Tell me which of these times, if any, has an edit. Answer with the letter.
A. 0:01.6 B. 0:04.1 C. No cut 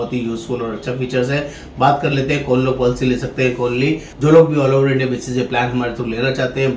B